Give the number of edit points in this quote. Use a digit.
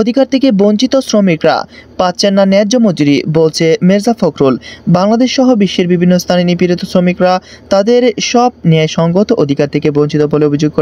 0